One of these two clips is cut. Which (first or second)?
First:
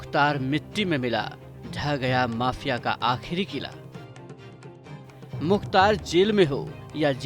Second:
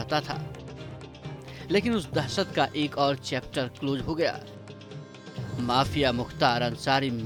first